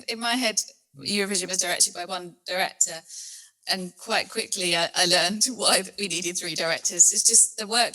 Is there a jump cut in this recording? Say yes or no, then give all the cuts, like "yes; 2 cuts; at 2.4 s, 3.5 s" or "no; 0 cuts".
no; 0 cuts